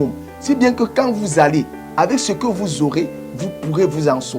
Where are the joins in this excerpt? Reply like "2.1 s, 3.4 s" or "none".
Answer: none